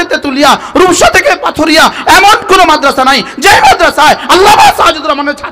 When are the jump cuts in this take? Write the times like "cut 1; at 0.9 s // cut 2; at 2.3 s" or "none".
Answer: none